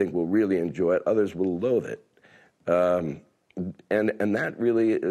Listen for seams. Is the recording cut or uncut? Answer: uncut